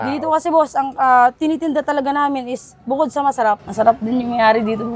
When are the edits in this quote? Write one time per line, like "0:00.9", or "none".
0:03.7